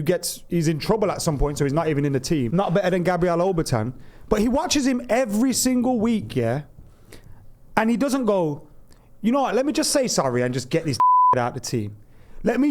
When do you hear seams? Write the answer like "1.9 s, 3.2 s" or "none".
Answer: 2.5 s